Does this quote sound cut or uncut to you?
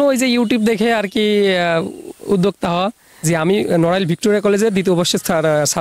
cut